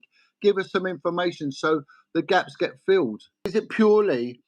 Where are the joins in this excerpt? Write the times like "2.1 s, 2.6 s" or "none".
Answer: 3.5 s